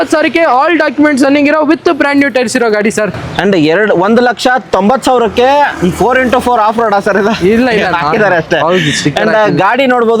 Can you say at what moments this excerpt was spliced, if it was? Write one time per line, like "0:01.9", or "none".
none